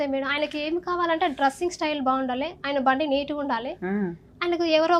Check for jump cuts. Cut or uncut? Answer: uncut